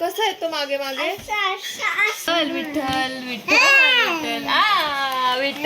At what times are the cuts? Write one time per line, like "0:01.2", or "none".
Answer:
0:02.3

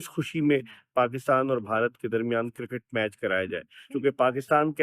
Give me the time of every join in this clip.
0:03.8

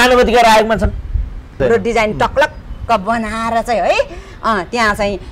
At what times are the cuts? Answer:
0:01.5

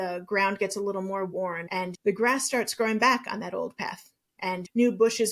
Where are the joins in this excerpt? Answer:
0:01.8

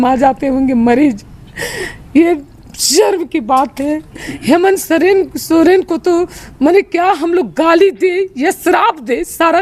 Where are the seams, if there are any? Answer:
none

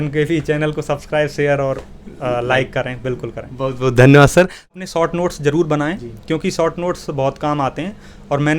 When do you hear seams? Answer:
0:04.6

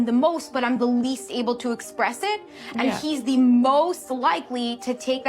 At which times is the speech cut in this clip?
0:02.6

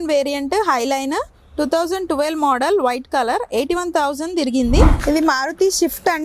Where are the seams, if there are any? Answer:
0:04.9

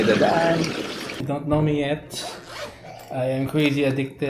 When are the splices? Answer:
0:01.1

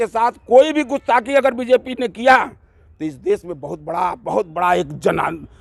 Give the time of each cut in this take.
none

